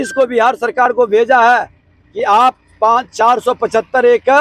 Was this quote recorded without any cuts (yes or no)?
yes